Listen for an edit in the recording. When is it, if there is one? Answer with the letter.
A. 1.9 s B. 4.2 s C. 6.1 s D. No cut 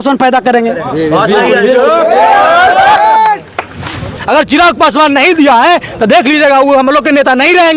B